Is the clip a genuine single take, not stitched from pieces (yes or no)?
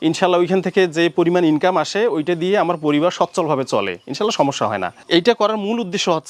no